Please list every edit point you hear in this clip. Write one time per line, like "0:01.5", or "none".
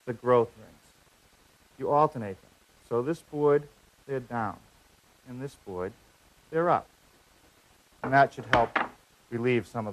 0:02.8